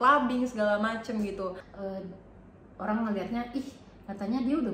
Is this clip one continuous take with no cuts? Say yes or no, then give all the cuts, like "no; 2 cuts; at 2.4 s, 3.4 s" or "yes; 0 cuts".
no; 1 cut; at 1.7 s